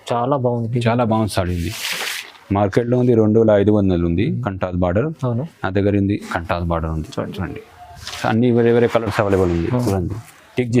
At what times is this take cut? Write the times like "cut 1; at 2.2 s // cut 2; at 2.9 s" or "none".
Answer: cut 1; at 8.2 s